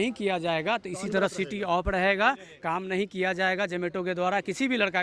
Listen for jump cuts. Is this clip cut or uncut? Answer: uncut